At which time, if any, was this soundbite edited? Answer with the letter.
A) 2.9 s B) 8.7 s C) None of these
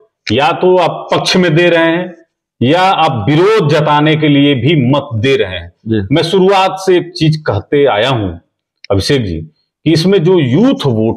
C